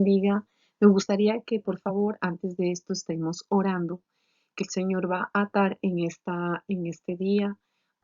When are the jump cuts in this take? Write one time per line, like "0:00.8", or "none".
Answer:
0:03.2